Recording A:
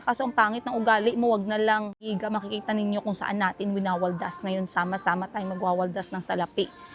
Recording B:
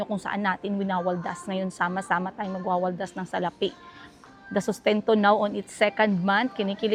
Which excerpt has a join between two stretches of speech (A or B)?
A